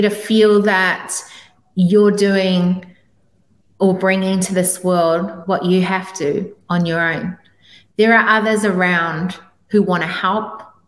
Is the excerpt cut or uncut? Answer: uncut